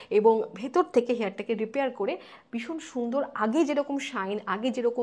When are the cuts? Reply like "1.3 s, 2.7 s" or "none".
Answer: none